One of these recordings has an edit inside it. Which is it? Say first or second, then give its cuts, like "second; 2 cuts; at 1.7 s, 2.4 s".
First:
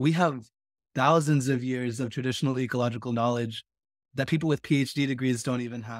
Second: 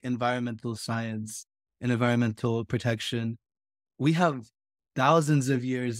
first; 1 cut; at 4.0 s